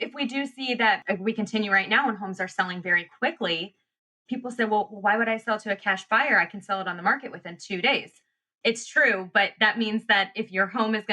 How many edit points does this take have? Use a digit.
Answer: 3